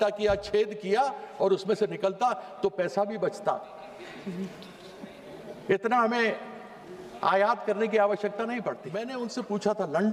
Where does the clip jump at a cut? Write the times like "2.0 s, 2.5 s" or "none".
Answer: 9.1 s